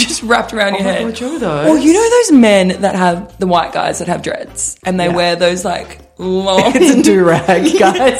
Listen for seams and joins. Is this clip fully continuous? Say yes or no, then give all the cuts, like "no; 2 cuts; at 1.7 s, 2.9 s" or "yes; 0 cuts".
yes; 0 cuts